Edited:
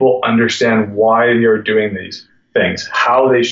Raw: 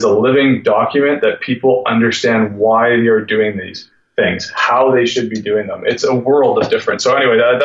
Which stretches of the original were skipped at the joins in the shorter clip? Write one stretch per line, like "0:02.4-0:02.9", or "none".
none